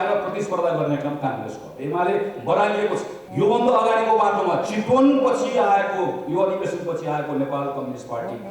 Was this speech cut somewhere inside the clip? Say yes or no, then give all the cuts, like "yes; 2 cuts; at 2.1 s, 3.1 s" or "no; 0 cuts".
yes; 1 cut; at 3.2 s